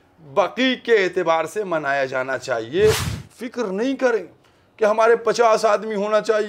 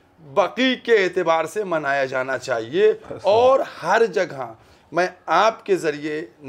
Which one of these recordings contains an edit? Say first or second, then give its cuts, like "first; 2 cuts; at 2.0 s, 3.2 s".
first; 1 cut; at 3.1 s